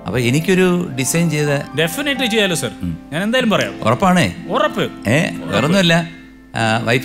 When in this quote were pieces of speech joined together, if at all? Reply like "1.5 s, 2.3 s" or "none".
none